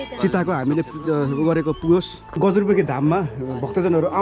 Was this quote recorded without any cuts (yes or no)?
no